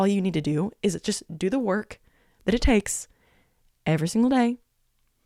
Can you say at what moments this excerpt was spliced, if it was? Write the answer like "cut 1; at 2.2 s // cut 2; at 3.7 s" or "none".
none